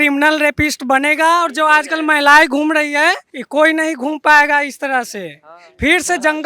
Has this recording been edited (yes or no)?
yes